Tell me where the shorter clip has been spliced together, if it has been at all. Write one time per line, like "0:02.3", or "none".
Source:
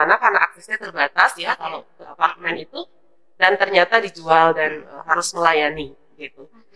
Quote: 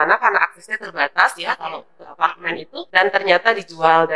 0:02.8